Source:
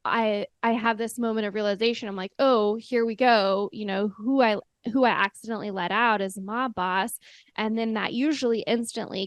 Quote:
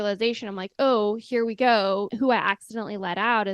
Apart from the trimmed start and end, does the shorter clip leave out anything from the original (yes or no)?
yes